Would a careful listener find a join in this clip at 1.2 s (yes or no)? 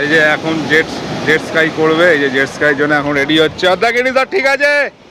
no